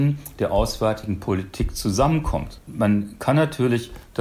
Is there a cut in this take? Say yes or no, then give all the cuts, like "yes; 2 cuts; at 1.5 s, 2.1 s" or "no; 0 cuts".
yes; 1 cut; at 2.6 s